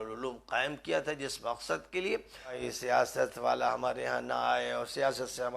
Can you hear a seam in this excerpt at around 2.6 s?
yes; 1 cut; at 2.6 s

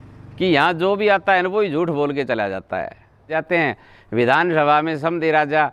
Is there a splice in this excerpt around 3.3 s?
yes; 1 cut; at 3.3 s

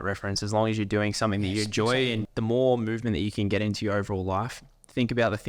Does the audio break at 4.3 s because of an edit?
no; 1 cut; at 2.3 s

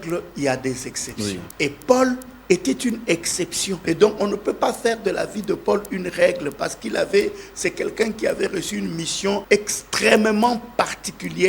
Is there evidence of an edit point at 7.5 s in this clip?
no; 3 cuts; at 1.5 s, 3.8 s, 9.4 s

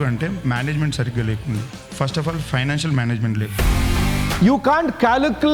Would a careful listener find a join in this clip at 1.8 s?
yes; 2 cuts; at 1.8 s, 3.9 s

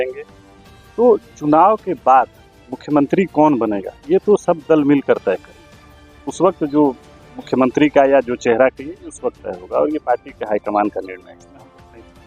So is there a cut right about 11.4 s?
yes; 1 cut; at 11.4 s

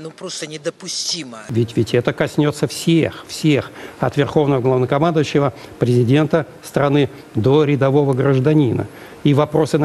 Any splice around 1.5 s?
yes; 1 cut; at 1.5 s

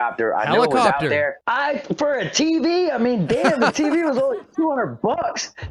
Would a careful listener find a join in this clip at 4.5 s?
no; 1 cut; at 1.4 s

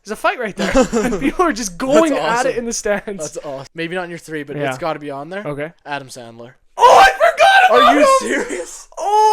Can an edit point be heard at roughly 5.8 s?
no; 1 cut; at 3.6 s

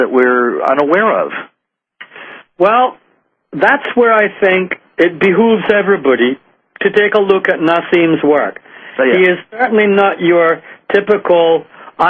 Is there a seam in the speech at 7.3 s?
yes; 1 cut; at 7.3 s

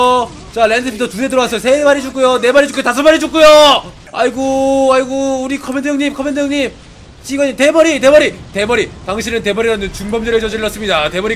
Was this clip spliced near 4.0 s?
yes; 1 cut; at 4.0 s

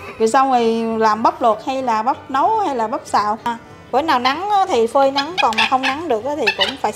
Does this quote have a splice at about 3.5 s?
yes; 1 cut; at 3.5 s

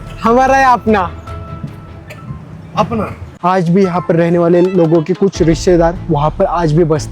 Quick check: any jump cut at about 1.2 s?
no; 1 cut; at 3.3 s

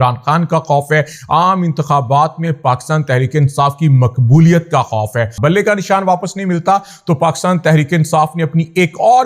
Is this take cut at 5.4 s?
yes; 1 cut; at 5.4 s

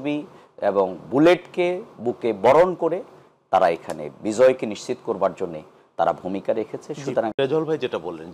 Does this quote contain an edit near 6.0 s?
no; 1 cut; at 7.3 s

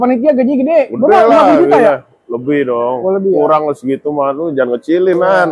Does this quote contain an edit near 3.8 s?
no; 0 cuts

